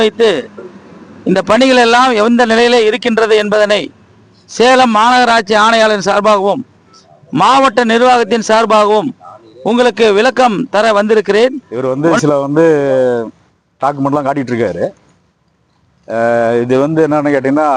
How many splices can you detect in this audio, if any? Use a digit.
1